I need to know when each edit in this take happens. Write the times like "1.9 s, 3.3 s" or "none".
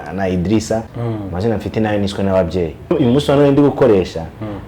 0.9 s, 2.9 s